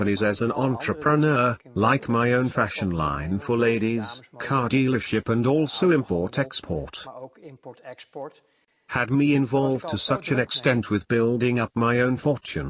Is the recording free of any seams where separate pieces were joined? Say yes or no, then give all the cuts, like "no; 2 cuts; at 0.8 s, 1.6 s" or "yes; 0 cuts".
no; 1 cut; at 4.4 s